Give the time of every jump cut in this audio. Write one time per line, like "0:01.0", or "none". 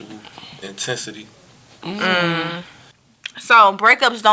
0:03.0